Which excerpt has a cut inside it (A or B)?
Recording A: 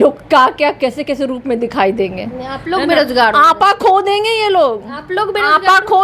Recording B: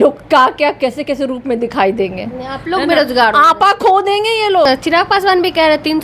B